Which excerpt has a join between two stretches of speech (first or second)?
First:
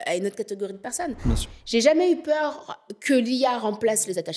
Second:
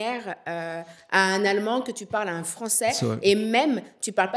first